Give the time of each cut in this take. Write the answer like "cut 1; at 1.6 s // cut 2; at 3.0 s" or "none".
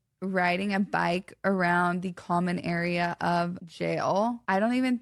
none